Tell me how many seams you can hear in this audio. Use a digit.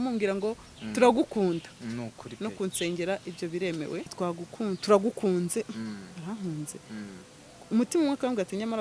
1